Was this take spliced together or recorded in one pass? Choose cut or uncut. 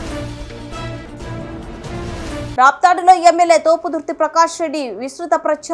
uncut